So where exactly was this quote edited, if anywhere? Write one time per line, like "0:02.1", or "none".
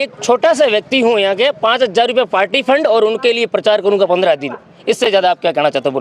none